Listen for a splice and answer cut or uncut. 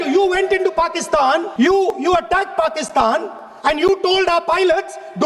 cut